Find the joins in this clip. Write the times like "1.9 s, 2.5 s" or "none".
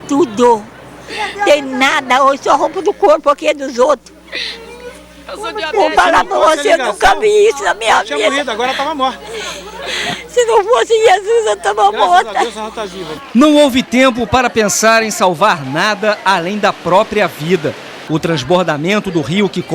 none